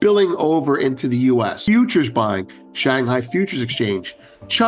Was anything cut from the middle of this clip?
yes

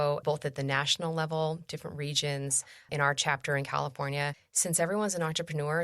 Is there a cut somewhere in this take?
yes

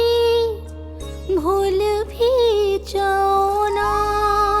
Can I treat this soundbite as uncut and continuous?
yes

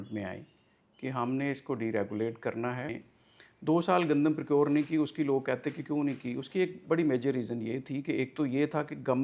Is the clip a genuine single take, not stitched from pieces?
no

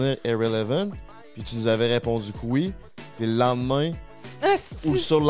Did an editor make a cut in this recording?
no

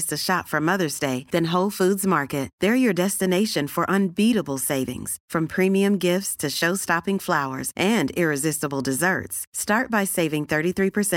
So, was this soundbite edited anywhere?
no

